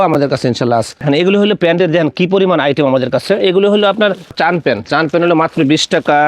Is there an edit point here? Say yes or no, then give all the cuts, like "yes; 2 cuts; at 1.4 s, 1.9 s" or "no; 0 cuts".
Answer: yes; 2 cuts; at 1.0 s, 4.3 s